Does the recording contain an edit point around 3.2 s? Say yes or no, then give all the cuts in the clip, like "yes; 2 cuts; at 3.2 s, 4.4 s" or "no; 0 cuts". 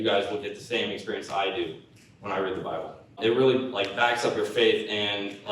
yes; 1 cut; at 3.2 s